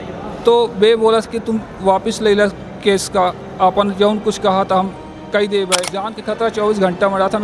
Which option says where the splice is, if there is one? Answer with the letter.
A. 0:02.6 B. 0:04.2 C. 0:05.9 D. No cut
C